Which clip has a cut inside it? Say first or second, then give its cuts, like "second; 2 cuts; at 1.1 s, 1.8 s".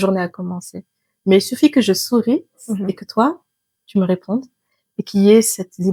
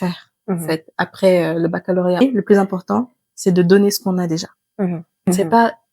second; 2 cuts; at 2.2 s, 5.3 s